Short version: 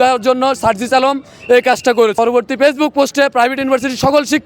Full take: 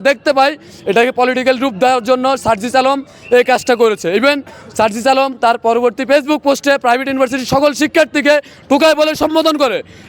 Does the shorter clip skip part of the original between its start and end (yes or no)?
yes